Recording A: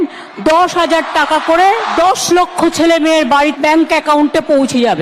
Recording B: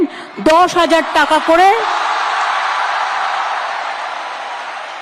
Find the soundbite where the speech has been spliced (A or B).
A